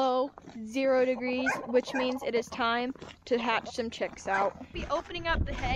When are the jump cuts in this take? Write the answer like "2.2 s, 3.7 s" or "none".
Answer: 4.8 s